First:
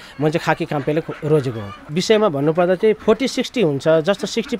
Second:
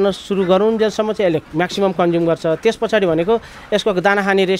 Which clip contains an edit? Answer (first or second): first